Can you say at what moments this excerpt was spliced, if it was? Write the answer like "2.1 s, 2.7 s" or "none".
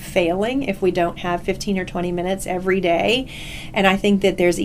none